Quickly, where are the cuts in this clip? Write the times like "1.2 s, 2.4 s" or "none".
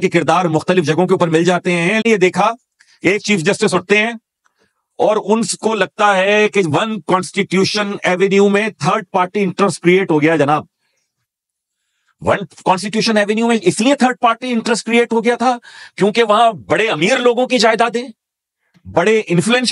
2.0 s

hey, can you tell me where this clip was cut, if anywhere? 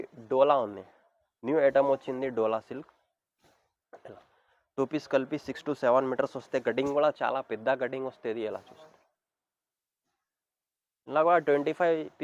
none

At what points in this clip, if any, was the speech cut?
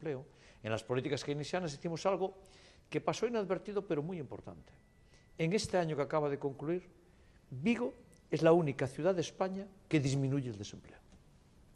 none

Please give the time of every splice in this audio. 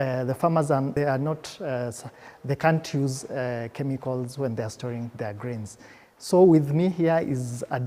0.9 s

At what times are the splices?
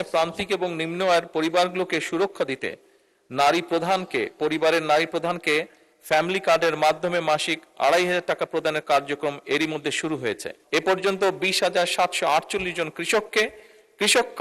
10.5 s

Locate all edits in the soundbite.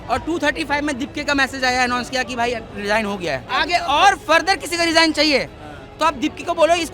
3.5 s

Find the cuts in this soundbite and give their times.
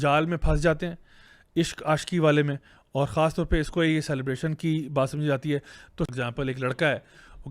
6.0 s

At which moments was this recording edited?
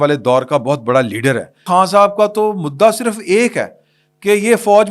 1.6 s

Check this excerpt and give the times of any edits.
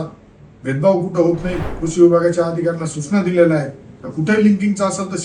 1.5 s

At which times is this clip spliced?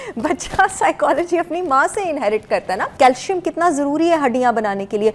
2.9 s

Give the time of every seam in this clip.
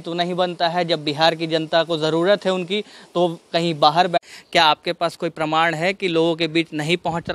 4.2 s

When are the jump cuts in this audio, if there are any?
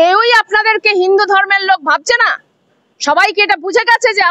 none

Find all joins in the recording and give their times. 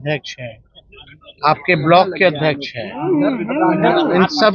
none

